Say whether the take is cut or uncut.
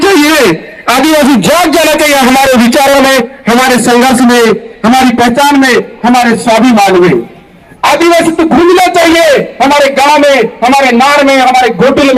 uncut